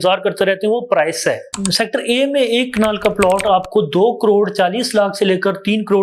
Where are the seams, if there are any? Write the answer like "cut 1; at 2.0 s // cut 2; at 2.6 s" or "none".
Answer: none